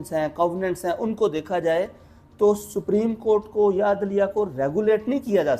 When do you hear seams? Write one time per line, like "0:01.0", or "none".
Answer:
none